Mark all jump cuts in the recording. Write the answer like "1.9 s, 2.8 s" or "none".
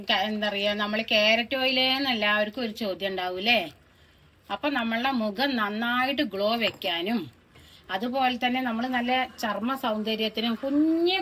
none